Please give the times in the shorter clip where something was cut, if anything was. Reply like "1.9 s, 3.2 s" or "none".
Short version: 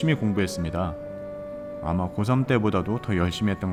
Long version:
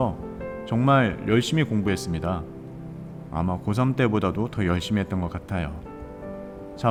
none